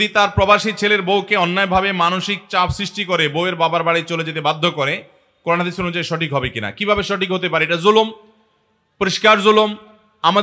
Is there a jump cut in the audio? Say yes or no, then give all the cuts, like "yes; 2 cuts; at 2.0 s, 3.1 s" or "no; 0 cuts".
no; 0 cuts